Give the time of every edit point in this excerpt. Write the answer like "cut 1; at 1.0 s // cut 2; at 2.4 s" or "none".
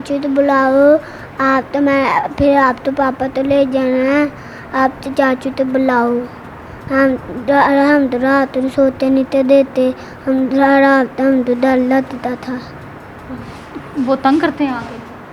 none

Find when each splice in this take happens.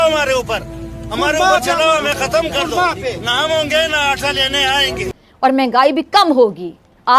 cut 1; at 5.1 s

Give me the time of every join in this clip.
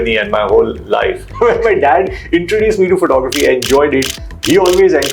cut 1; at 1.3 s

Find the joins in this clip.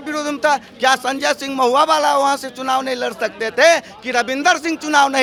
none

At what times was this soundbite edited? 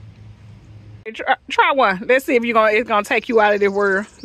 cut 1; at 1.0 s

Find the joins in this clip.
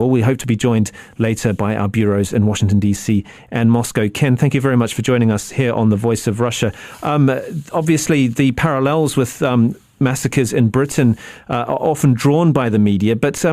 cut 1; at 6.9 s

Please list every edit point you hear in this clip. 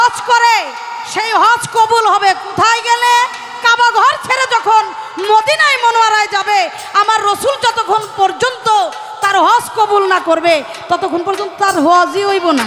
none

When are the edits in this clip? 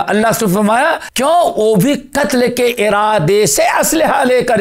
cut 1; at 1.1 s

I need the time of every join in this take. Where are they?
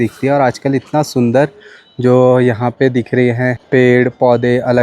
cut 1; at 3.6 s

